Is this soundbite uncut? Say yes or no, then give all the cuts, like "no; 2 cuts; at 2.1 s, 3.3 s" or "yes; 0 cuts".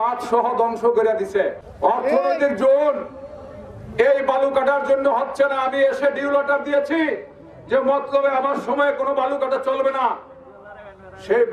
no; 1 cut; at 1.6 s